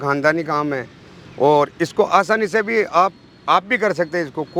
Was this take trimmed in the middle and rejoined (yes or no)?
no